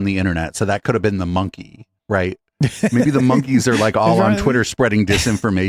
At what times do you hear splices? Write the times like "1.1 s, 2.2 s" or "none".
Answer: none